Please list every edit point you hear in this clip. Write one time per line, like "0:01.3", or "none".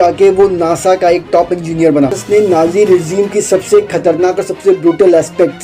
0:02.2